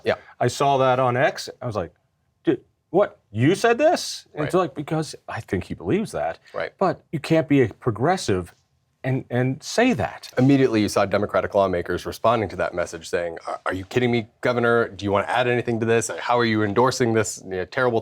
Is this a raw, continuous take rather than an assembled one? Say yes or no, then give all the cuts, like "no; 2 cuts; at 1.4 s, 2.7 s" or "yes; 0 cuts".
no; 2 cuts; at 7.1 s, 10.3 s